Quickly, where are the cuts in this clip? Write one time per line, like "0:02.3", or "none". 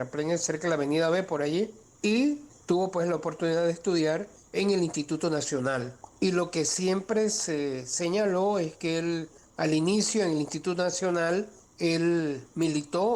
0:01.8
0:02.5
0:04.4
0:06.0
0:09.4
0:11.6